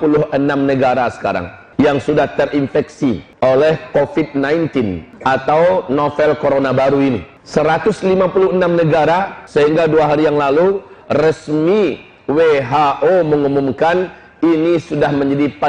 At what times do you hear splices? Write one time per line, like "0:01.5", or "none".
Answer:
0:01.6
0:03.3
0:05.1
0:07.3
0:09.4